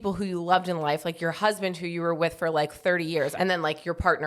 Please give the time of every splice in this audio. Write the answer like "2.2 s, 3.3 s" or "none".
3.3 s